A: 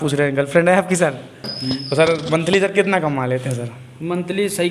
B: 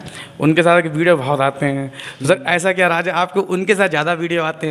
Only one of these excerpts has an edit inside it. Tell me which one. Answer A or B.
A